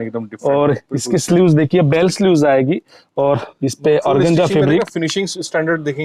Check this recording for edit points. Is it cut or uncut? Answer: uncut